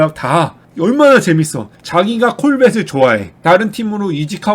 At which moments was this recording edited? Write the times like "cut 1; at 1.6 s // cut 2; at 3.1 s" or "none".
cut 1; at 3.3 s